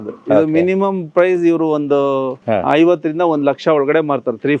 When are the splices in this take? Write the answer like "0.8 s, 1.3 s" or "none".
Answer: 2.4 s